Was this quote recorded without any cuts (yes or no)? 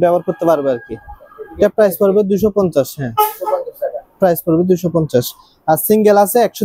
yes